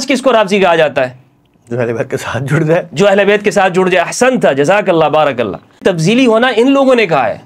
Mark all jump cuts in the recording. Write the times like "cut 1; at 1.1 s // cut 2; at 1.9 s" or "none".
cut 1; at 5.8 s